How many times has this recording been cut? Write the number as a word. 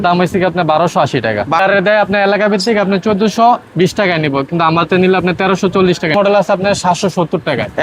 two